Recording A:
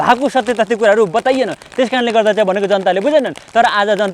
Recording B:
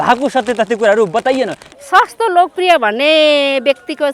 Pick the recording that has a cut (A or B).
B